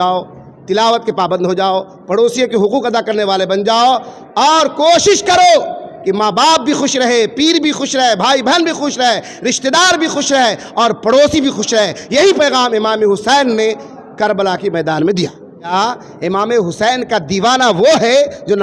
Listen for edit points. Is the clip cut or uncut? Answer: cut